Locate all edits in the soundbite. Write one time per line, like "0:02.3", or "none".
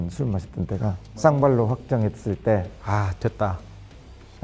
none